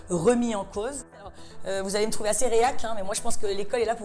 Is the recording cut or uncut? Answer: cut